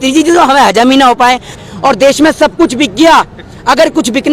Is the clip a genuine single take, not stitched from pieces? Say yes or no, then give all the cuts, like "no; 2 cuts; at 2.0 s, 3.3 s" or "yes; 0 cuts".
no; 1 cut; at 1.6 s